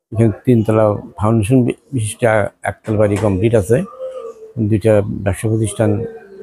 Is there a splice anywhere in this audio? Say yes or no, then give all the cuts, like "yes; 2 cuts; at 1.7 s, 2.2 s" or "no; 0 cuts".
no; 0 cuts